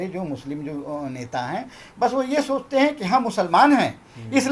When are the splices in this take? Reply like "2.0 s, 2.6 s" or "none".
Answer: none